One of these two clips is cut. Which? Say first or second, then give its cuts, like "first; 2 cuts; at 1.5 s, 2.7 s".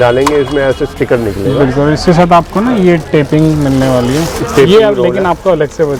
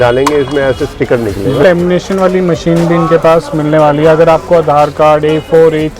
second; 1 cut; at 1.6 s